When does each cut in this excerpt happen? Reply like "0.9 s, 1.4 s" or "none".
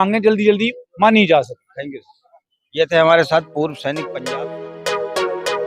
4.0 s